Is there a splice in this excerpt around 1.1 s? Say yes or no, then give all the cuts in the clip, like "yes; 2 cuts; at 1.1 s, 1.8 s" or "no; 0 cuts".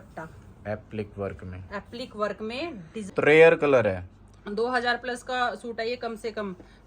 no; 1 cut; at 3.1 s